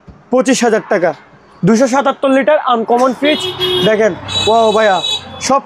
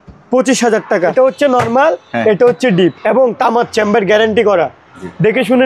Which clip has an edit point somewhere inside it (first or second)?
second